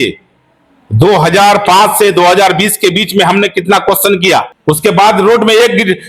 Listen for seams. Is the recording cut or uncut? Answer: cut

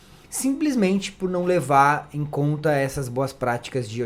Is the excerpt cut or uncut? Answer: uncut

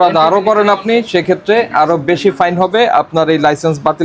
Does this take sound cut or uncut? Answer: uncut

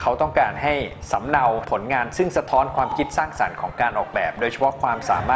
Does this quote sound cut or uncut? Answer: uncut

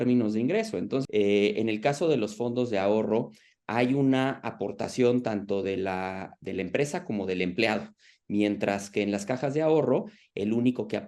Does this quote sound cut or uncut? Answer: cut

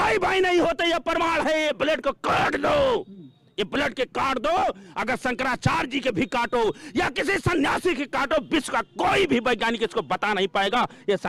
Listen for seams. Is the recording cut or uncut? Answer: uncut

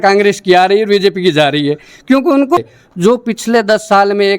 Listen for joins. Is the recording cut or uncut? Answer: cut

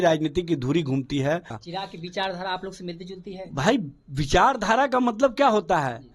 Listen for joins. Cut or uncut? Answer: cut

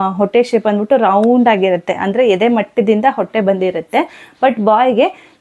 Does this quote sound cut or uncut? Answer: uncut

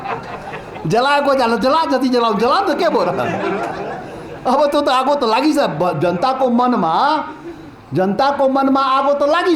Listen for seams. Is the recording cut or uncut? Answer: uncut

